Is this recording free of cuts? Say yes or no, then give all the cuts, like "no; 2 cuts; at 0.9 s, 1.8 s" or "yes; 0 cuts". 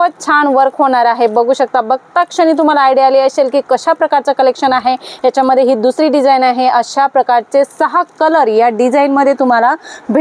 yes; 0 cuts